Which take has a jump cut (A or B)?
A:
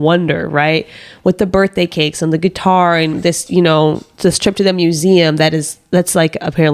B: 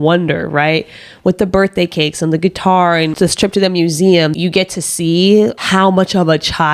B